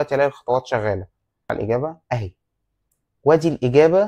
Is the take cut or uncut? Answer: cut